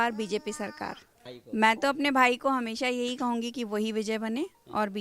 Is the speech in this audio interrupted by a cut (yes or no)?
yes